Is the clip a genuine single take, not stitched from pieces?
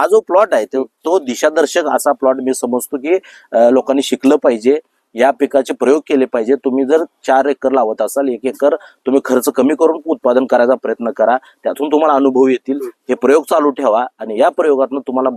yes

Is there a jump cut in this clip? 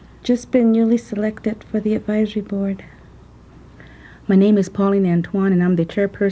yes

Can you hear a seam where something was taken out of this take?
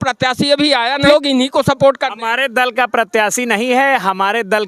yes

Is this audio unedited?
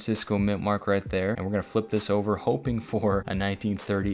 no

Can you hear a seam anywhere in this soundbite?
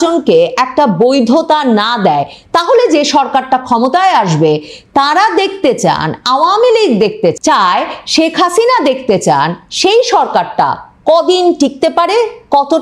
yes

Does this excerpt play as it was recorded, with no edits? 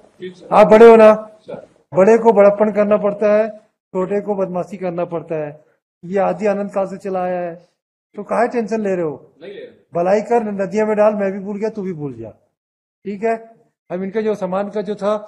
yes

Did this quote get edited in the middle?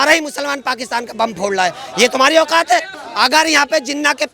yes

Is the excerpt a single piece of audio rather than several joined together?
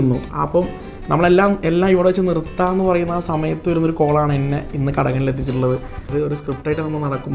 no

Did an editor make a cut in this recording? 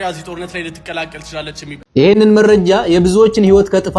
yes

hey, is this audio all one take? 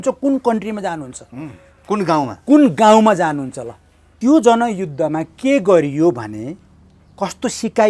no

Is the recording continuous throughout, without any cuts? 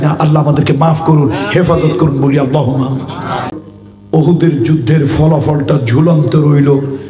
no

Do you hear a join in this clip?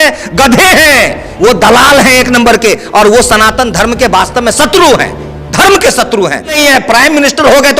yes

